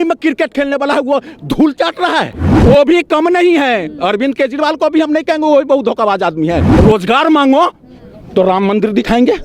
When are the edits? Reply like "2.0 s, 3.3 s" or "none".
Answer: 2.5 s, 6.7 s